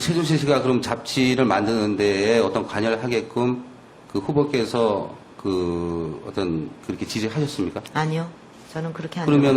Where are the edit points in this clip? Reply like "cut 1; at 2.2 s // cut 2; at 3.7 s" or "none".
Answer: cut 1; at 4.1 s